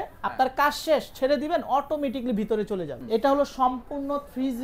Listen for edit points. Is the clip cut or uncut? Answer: cut